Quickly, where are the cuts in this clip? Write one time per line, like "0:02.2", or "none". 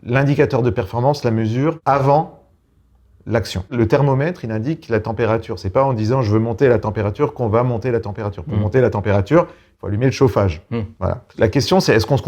0:01.8
0:03.7
0:11.3